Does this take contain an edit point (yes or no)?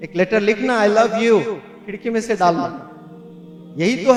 no